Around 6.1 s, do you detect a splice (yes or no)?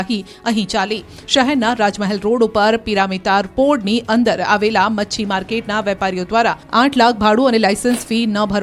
yes